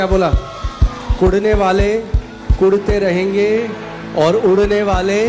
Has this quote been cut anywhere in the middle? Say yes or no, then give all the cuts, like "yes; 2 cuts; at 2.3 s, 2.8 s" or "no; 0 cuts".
no; 0 cuts